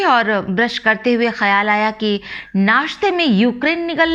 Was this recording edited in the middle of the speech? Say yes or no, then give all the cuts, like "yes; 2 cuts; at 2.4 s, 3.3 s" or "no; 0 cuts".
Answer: no; 0 cuts